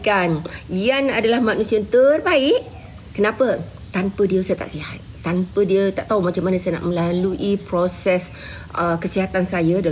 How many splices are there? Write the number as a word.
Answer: zero